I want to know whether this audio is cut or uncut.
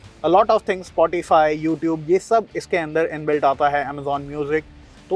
uncut